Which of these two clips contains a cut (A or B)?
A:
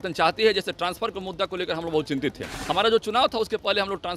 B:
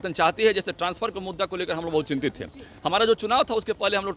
A